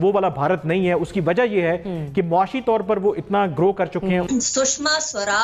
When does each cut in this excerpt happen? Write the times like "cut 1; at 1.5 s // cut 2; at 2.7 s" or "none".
cut 1; at 4.3 s